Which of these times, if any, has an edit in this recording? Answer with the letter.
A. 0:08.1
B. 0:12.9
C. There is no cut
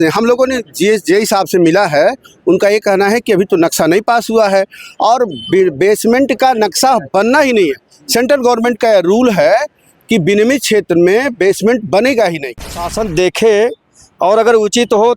B